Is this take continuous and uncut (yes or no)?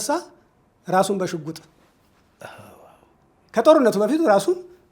yes